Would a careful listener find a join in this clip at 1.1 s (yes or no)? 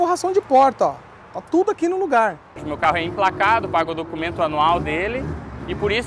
no